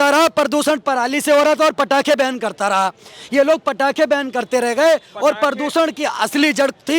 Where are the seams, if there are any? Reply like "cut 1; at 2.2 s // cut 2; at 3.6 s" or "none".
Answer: none